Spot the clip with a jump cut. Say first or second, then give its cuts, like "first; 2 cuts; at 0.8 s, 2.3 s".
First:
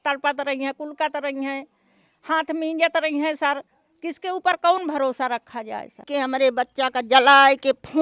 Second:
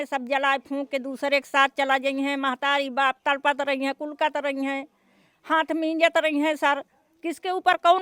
first; 1 cut; at 6.1 s